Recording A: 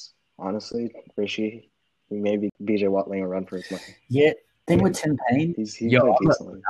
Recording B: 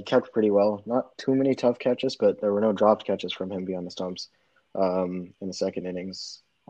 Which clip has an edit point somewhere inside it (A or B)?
A